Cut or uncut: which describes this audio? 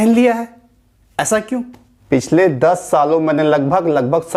cut